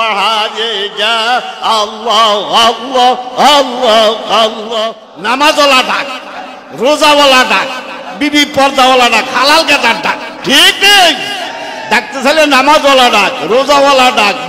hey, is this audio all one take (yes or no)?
no